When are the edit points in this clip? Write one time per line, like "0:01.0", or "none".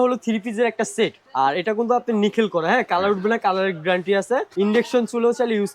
0:01.2
0:04.5